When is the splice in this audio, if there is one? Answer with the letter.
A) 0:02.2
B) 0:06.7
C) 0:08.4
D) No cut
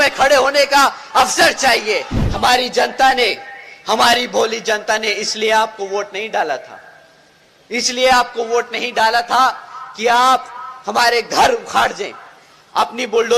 A